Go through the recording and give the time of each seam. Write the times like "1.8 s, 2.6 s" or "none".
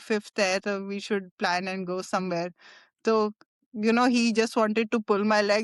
none